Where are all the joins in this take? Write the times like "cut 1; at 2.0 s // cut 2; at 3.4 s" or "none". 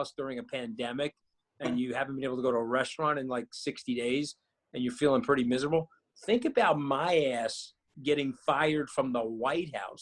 none